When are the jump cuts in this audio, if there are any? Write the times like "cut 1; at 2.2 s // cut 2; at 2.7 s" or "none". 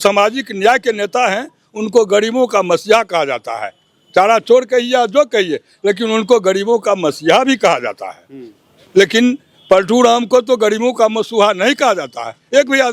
none